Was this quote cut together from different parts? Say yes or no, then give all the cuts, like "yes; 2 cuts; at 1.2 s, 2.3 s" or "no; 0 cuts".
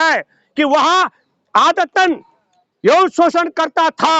no; 0 cuts